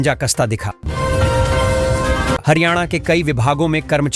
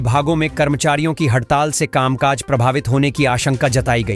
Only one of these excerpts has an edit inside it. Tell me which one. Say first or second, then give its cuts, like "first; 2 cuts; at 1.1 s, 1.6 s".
first; 2 cuts; at 0.8 s, 2.4 s